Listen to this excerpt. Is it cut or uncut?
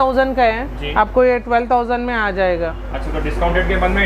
uncut